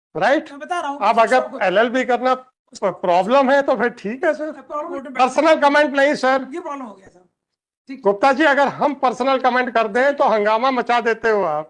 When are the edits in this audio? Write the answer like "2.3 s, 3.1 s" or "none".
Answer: 5.0 s